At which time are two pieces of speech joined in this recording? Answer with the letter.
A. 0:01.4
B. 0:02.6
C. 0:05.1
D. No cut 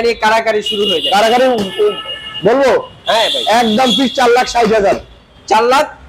D